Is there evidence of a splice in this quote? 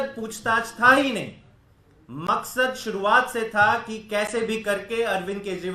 no; 0 cuts

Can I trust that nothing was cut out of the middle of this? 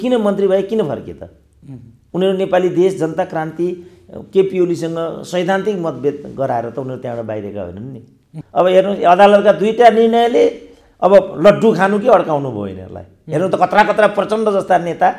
no; 1 cut; at 8.3 s

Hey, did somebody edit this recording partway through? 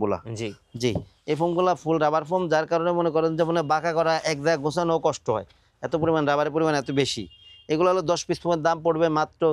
no; 0 cuts

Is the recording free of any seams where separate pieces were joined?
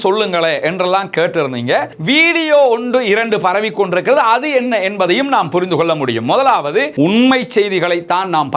no; 2 cuts; at 2.0 s, 6.9 s

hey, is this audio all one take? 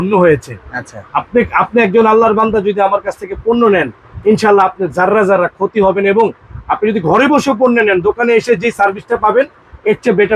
yes; 0 cuts

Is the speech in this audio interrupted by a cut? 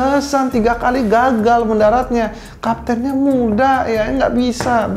no; 0 cuts

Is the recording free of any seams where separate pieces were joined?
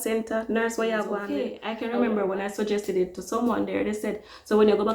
no; 1 cut; at 1.2 s

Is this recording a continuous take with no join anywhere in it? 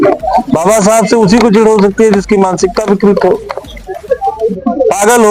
yes; 0 cuts

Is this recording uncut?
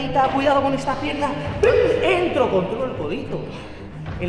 yes; 0 cuts

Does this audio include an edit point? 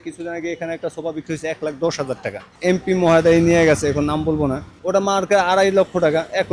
yes; 2 cuts; at 2.5 s, 4.7 s

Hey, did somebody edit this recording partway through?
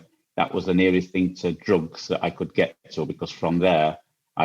no; 0 cuts

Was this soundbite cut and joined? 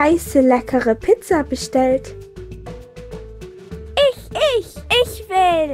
no; 0 cuts

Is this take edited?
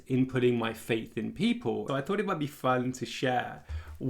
yes; 1 cut; at 1.8 s

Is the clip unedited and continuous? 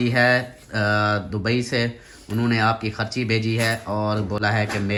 yes; 0 cuts

